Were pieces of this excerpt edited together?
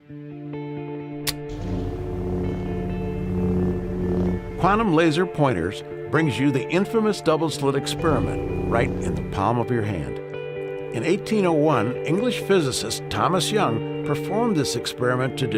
no; 0 cuts

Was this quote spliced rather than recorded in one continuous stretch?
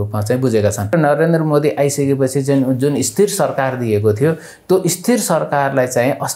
yes; 1 cut; at 0.9 s

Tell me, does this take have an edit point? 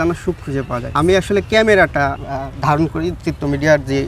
yes; 2 cuts; at 0.9 s, 2.3 s

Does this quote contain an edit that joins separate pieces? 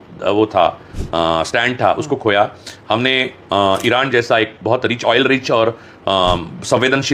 no; 0 cuts

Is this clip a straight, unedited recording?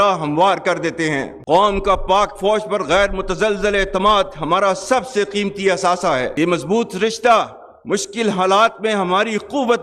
yes; 0 cuts

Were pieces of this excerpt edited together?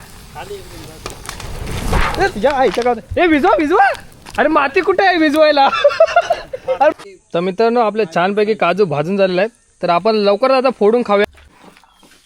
yes; 2 cuts; at 6.9 s, 11.2 s

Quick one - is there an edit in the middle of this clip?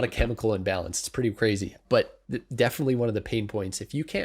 no; 0 cuts

